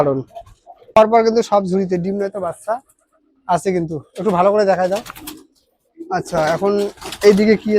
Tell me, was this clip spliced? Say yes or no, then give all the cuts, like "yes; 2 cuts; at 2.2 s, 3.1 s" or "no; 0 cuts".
yes; 1 cut; at 1.0 s